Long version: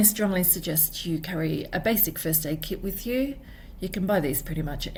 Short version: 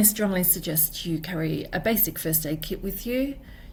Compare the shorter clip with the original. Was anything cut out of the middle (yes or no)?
no